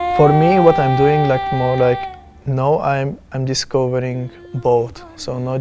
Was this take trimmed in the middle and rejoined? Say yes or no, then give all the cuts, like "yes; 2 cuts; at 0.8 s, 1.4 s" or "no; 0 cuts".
no; 0 cuts